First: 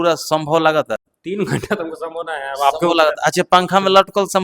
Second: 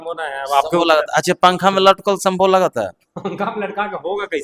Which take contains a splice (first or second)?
first